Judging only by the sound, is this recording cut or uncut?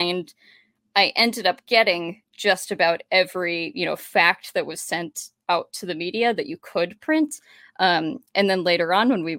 uncut